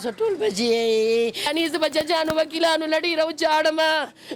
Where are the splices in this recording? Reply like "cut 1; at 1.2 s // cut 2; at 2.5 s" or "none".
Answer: cut 1; at 1.5 s